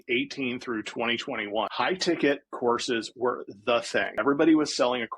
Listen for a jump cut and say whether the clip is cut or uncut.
cut